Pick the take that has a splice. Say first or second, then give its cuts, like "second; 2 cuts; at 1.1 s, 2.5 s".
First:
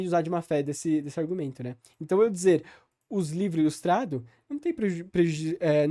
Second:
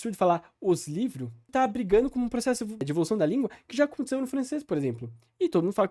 second; 2 cuts; at 1.5 s, 2.9 s